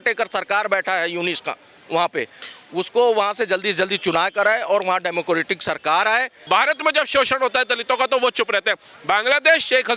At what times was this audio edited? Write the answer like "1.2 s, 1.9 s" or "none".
6.4 s